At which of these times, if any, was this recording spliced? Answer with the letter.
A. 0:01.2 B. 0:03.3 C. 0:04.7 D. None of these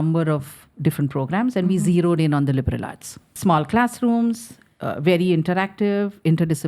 B